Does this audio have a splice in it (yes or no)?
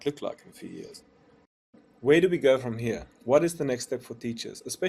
yes